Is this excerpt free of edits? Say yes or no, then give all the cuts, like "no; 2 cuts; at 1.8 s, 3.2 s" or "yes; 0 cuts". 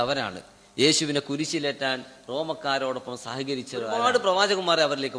no; 1 cut; at 4.0 s